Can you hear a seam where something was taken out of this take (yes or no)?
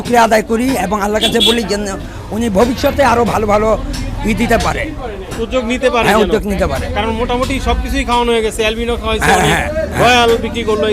no